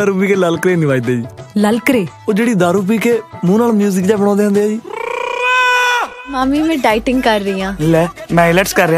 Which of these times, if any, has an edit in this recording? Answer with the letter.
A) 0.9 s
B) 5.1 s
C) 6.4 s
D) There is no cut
C